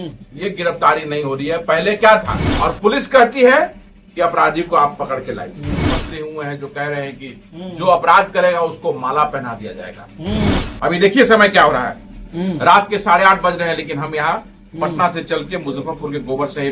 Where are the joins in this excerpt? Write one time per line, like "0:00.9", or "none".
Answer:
0:02.4
0:05.9
0:10.6